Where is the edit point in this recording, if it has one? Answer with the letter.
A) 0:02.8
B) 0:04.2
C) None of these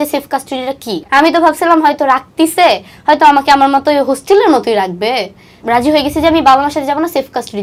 C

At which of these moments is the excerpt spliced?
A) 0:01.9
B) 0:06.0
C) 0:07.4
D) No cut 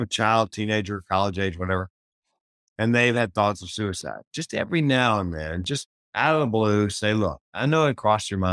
B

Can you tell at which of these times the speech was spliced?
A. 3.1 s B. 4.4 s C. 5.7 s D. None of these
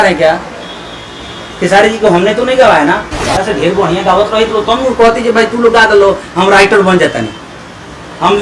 A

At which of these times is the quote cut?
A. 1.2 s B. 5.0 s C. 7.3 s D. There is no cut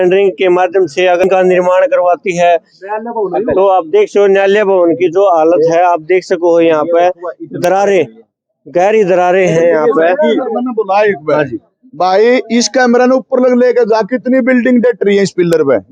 A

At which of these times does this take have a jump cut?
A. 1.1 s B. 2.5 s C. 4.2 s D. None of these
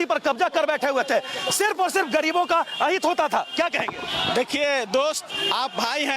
D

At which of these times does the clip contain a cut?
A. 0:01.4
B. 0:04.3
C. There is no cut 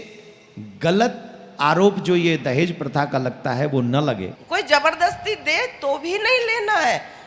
B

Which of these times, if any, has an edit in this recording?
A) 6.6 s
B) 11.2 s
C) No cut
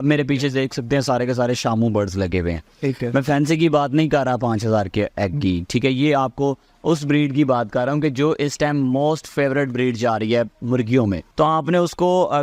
B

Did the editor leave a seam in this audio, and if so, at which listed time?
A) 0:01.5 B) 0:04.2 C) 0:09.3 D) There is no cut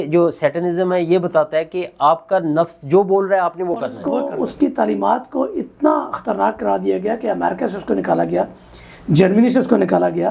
B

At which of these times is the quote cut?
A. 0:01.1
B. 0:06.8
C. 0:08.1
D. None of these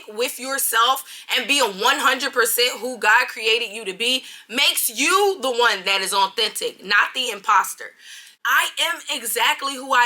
C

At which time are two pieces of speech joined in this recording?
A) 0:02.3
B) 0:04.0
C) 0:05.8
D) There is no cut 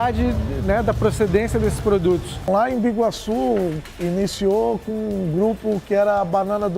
A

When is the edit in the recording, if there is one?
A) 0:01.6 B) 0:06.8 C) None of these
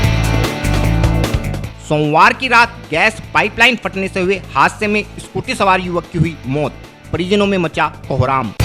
C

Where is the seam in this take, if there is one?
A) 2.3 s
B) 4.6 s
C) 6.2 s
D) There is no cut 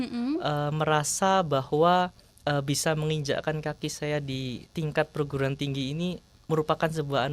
D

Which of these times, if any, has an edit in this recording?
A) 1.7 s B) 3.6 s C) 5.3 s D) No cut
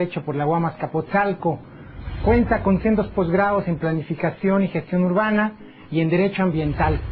D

